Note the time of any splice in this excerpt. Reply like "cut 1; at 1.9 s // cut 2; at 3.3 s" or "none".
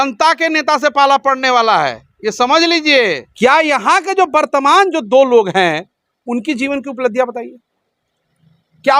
cut 1; at 3.2 s

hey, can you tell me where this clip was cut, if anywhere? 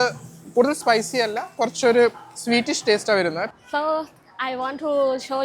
cut 1; at 3.5 s

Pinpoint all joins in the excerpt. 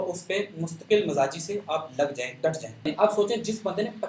cut 1; at 2.9 s

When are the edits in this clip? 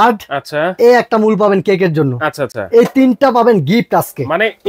none

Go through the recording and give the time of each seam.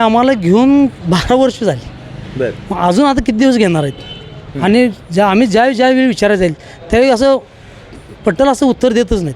none

